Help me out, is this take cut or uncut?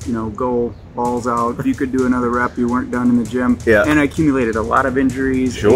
cut